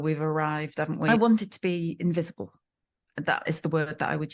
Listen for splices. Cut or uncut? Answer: cut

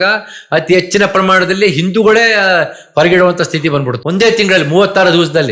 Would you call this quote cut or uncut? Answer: cut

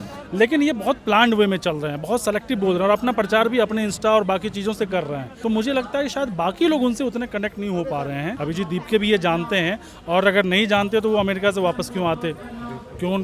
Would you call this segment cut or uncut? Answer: cut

